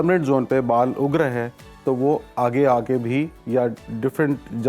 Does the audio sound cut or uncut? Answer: uncut